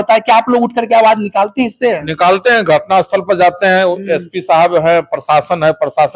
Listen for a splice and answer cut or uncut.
uncut